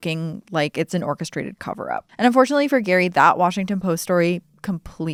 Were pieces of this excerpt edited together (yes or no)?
no